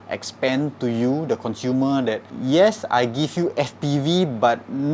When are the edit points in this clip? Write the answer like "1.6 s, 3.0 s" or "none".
2.3 s